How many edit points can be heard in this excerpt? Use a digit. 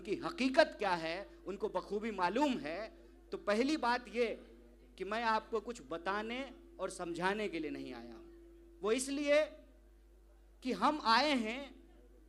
0